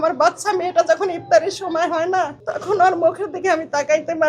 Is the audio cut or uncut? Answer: cut